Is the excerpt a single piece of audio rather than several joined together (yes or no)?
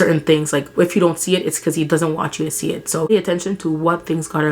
no